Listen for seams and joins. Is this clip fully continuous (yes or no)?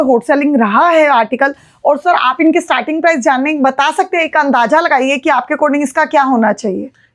yes